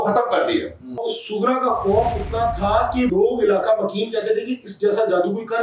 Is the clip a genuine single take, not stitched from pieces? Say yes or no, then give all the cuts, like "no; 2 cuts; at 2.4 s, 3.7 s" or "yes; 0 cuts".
no; 2 cuts; at 1.0 s, 3.1 s